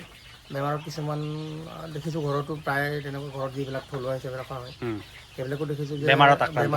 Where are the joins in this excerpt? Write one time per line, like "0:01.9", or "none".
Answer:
none